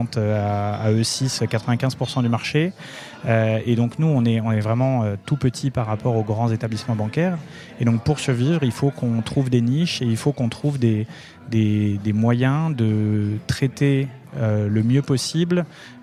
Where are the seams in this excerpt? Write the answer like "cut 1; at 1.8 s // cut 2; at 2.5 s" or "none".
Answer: none